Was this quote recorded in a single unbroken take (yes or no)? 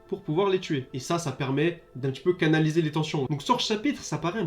no